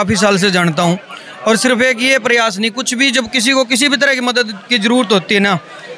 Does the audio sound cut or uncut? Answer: uncut